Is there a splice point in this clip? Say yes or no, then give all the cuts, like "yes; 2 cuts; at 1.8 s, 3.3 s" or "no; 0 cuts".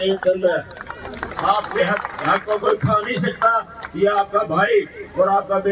yes; 1 cut; at 1.3 s